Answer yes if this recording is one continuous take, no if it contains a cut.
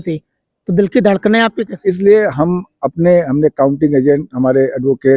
no